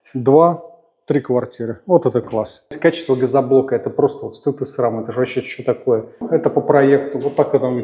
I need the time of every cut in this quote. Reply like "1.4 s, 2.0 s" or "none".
2.7 s, 6.2 s